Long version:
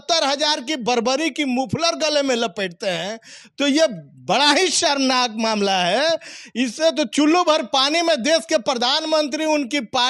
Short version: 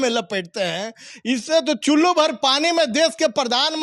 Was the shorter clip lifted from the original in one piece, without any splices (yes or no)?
no